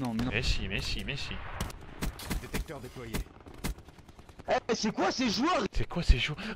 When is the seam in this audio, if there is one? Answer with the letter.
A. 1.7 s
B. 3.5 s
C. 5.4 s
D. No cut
A